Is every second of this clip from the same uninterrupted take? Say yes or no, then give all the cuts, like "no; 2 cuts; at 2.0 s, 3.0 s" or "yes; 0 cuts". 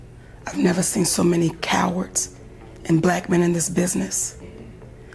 yes; 0 cuts